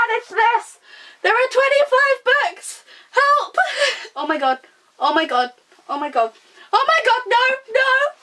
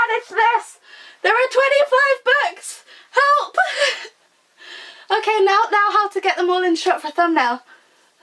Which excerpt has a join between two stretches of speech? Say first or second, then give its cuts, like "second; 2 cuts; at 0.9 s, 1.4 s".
first; 1 cut; at 4.0 s